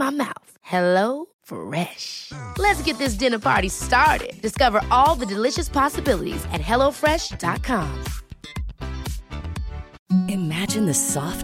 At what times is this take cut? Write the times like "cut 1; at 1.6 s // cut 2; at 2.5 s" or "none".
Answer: none